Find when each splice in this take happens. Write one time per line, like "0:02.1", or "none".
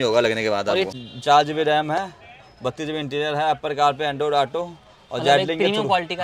0:00.9